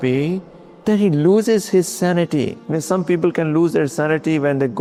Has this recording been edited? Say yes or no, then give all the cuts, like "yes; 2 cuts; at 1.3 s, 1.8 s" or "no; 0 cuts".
no; 0 cuts